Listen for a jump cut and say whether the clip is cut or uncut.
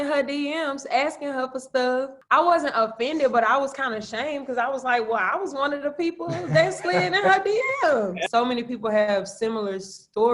cut